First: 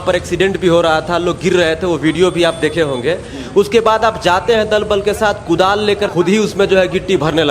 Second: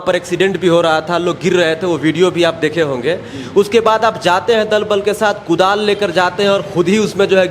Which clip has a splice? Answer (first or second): first